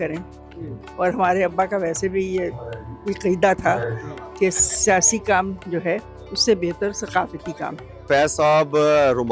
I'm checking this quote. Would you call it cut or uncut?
cut